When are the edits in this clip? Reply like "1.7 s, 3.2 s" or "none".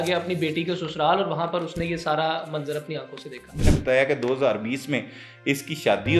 3.5 s